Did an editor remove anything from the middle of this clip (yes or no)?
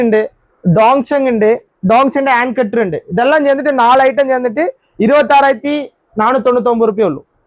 no